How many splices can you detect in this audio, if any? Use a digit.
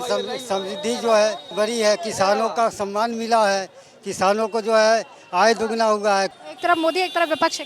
2